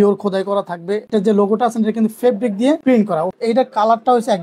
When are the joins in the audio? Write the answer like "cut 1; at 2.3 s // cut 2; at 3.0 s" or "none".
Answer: cut 1; at 1.1 s // cut 2; at 3.2 s